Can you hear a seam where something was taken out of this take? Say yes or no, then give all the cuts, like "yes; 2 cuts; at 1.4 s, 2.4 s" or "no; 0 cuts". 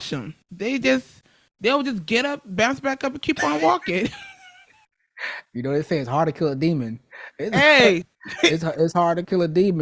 no; 0 cuts